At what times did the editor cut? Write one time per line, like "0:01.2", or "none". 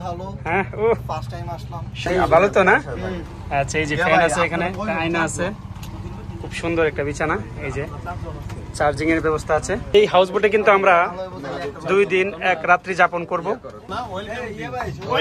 0:02.1
0:09.9
0:14.2

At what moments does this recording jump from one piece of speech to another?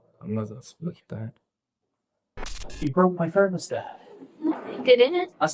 0:02.6

